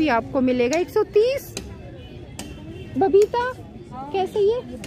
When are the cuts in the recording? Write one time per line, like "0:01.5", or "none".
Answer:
none

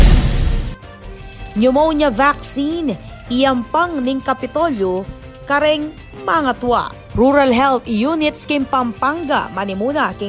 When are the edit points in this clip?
0:01.2

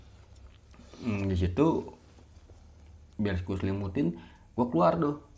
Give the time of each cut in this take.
none

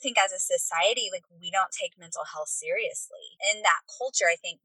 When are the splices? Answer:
0:03.3

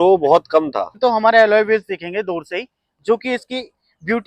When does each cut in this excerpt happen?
0:00.9

